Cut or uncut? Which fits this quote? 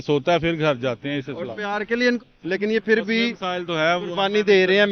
cut